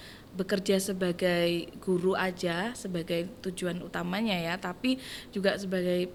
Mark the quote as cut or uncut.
uncut